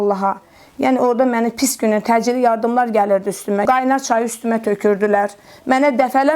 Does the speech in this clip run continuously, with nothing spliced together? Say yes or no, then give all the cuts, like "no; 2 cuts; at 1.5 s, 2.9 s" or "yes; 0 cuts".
no; 1 cut; at 3.6 s